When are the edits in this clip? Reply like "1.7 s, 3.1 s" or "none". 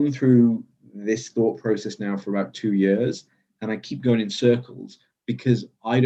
none